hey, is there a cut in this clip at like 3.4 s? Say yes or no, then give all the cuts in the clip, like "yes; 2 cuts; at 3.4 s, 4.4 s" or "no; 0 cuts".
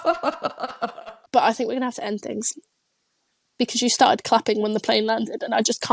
no; 1 cut; at 0.9 s